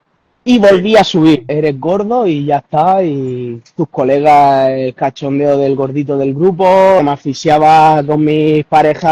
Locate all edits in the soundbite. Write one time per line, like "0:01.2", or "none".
0:01.5
0:07.0